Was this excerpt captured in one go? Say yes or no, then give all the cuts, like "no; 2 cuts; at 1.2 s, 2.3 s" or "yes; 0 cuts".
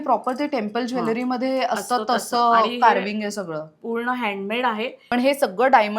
no; 1 cut; at 5.0 s